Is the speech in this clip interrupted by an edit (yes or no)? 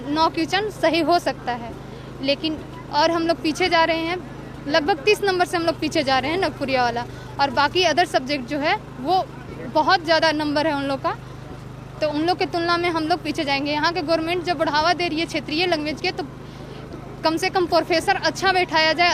no